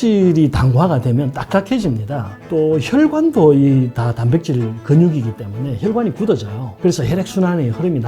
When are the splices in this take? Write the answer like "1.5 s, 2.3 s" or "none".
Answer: 2.3 s

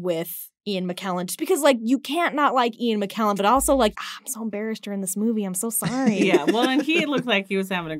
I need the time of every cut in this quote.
3.9 s

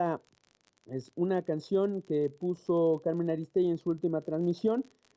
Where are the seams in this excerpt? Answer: 2.6 s

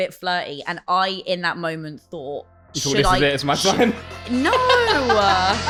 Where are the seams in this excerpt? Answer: none

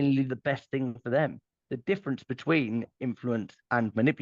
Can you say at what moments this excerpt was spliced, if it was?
2.9 s

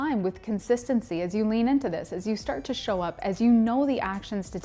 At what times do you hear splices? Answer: none

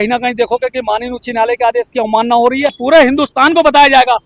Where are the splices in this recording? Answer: 2.8 s

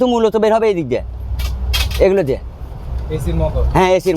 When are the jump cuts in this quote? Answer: none

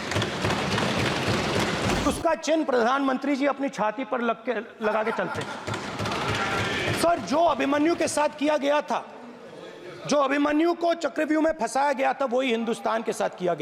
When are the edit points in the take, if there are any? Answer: 2.1 s

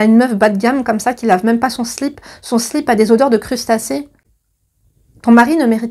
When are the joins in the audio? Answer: none

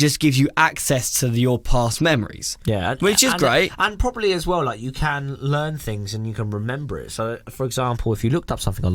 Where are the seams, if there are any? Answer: none

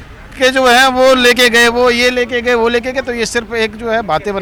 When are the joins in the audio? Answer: none

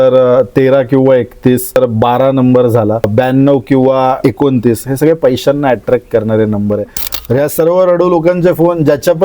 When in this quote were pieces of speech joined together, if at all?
1.8 s, 3.1 s, 4.2 s, 7.0 s

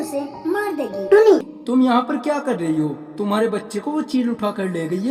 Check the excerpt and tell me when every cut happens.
1.5 s

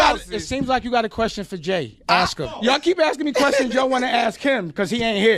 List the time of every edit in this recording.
2.6 s

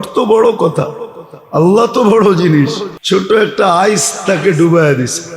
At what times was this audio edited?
2.9 s

